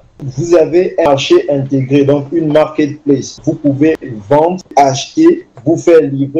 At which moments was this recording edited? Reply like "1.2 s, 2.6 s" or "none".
3.4 s, 4.7 s, 5.5 s